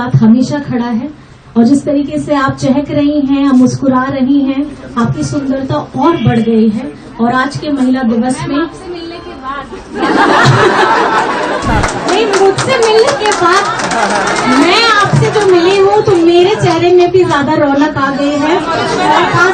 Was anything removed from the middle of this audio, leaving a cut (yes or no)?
no